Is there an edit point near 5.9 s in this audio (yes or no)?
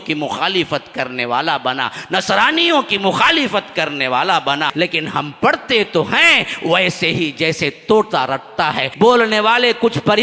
no